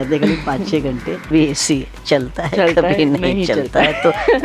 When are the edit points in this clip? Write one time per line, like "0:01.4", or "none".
0:01.3